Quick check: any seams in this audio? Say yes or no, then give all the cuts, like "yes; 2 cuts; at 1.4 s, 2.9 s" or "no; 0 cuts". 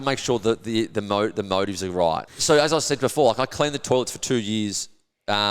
yes; 1 cut; at 2.3 s